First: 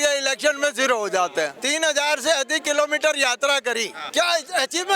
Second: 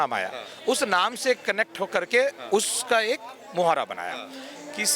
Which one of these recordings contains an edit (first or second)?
first